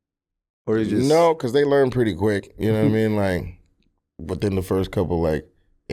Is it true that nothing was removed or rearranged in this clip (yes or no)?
yes